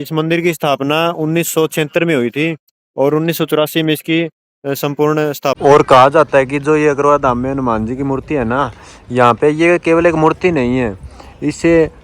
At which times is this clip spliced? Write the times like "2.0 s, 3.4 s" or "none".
5.6 s